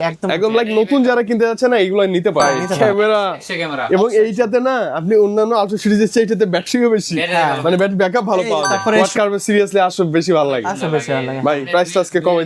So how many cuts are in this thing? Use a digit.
2